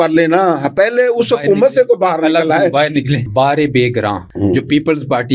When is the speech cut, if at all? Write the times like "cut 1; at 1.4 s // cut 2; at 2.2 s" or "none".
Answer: cut 1; at 3.2 s // cut 2; at 4.3 s